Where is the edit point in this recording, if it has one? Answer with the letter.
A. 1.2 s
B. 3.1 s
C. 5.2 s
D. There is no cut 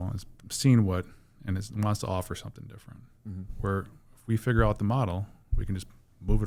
D